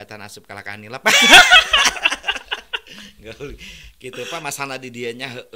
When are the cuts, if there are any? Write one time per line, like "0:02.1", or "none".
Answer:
none

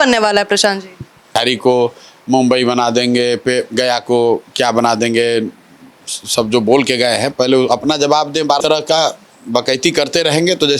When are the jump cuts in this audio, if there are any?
0:01.4
0:08.6

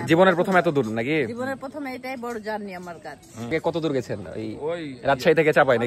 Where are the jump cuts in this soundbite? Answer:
none

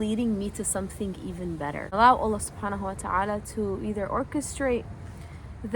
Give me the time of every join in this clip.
0:01.9

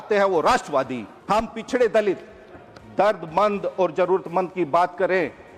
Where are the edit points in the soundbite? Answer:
0:01.1

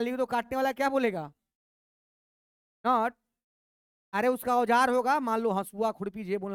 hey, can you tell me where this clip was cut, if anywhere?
none

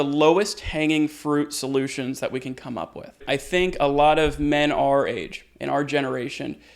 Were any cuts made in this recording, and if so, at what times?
0:03.2

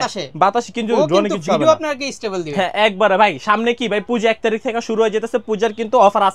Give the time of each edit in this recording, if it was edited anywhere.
none

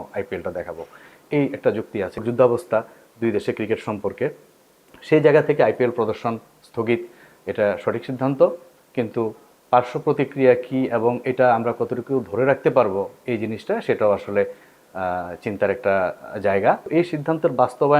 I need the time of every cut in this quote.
0:02.2
0:16.9

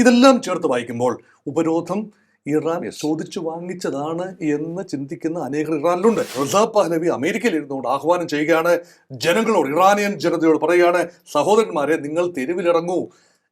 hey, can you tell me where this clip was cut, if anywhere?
0:06.3

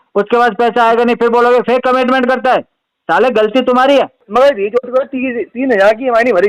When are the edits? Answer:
0:04.2

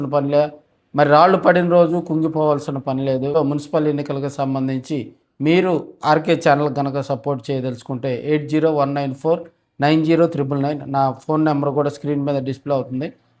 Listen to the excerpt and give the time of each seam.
0:03.3

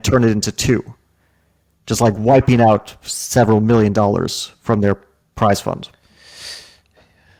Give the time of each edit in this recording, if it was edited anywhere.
none

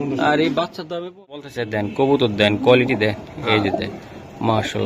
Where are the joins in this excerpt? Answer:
0:01.5

